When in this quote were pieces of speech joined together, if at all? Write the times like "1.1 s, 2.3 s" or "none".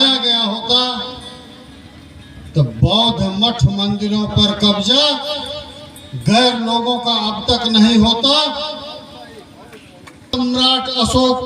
10.3 s